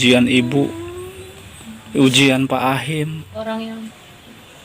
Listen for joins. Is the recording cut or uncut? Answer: cut